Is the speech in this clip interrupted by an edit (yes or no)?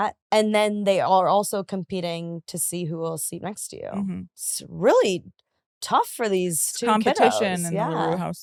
no